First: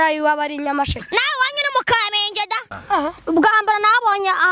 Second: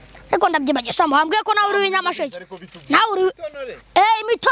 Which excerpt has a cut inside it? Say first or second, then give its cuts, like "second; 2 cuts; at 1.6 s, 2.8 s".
first; 1 cut; at 2.7 s